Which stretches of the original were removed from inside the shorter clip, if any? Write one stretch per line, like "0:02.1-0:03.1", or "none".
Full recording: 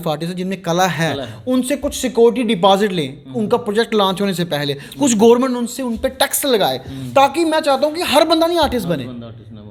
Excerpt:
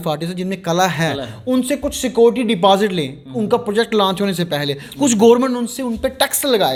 none